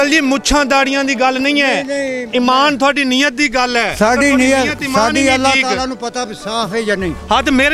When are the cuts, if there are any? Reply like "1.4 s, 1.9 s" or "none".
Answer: none